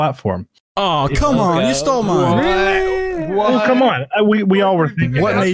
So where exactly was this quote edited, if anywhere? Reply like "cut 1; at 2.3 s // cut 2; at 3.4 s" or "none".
none